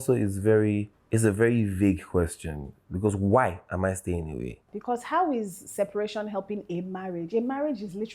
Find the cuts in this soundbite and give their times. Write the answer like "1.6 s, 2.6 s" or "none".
1.0 s, 4.7 s